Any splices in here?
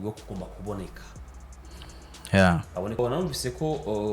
yes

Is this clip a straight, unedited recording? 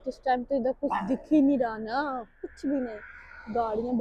yes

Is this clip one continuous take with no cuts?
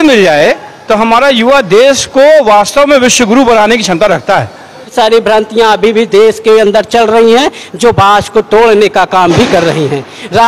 no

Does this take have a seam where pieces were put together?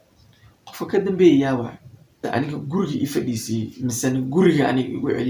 yes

